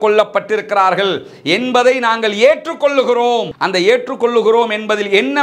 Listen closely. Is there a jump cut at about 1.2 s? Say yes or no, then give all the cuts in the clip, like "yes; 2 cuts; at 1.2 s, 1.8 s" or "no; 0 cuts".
no; 0 cuts